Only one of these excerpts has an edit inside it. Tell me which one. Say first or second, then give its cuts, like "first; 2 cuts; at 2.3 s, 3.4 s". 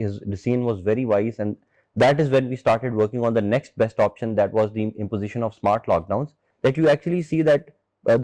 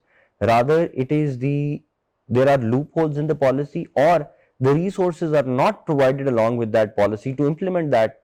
first; 1 cut; at 6.5 s